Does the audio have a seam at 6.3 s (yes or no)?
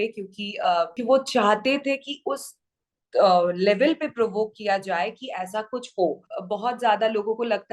yes